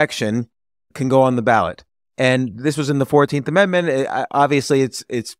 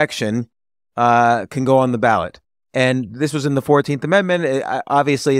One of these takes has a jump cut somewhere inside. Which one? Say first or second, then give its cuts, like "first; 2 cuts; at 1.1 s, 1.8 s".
first; 1 cut; at 0.9 s